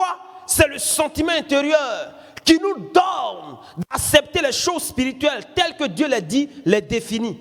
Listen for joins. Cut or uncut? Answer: uncut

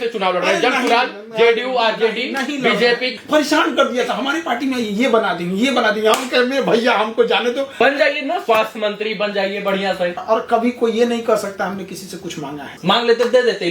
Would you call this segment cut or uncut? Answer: cut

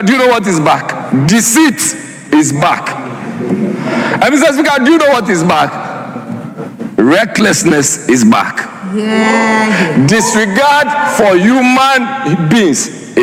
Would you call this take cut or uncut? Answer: uncut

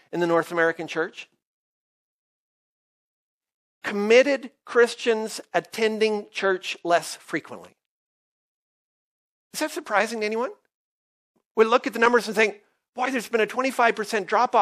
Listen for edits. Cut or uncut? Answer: cut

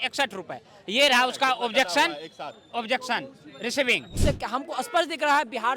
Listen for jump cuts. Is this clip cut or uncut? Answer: cut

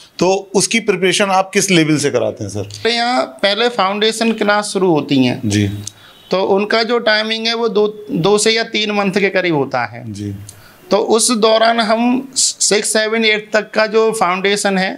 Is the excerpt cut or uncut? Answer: cut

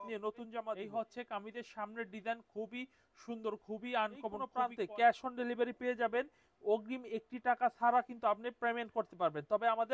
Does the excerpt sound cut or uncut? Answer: cut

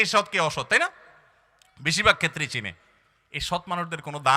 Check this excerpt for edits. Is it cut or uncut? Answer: uncut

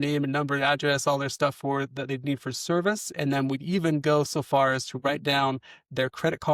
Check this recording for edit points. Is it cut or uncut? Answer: uncut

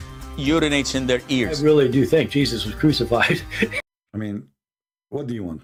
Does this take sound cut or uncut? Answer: uncut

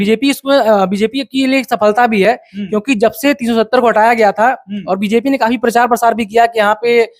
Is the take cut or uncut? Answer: uncut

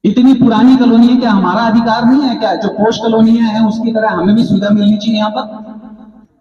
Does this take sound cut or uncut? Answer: uncut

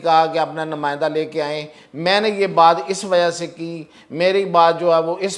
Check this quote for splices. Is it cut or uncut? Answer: uncut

